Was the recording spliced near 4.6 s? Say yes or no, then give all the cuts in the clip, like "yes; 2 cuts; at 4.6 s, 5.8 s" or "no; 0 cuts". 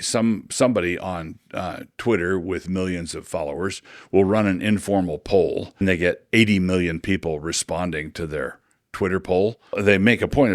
no; 2 cuts; at 5.8 s, 9.6 s